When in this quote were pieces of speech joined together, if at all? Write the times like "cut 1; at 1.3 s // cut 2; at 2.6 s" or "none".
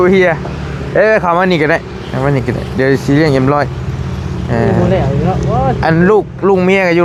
none